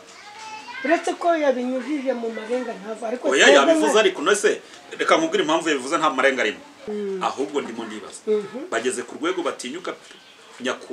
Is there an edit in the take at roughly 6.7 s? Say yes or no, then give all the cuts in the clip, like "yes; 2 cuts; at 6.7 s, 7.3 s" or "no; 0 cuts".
yes; 1 cut; at 6.7 s